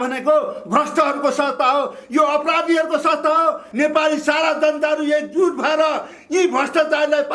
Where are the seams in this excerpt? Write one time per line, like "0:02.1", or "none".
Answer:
0:03.7

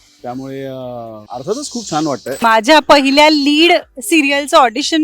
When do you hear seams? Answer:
0:01.2
0:02.4

